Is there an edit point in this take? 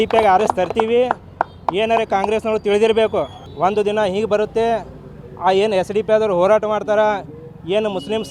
no; 0 cuts

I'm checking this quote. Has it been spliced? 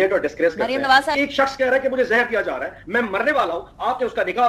yes; 1 cut; at 1.1 s

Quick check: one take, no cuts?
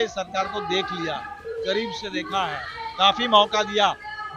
yes; 0 cuts

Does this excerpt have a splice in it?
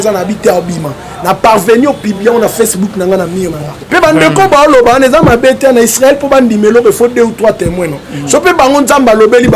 yes; 1 cut; at 3.7 s

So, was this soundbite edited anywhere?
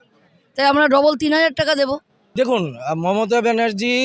yes; 1 cut; at 2.2 s

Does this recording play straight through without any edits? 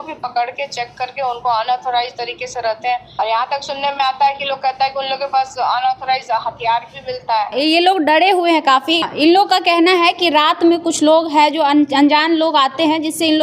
no; 3 cuts; at 3.1 s, 7.5 s, 9.0 s

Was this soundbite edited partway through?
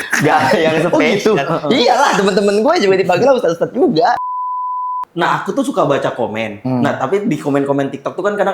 yes; 1 cut; at 4.4 s

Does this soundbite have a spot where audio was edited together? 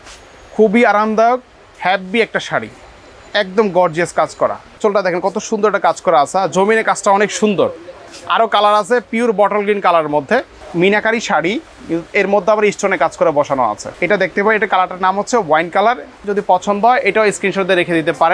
yes; 4 cuts; at 4.8 s, 10.6 s, 13.9 s, 16.2 s

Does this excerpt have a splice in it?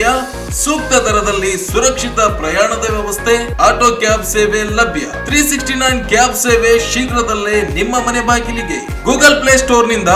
no; 0 cuts

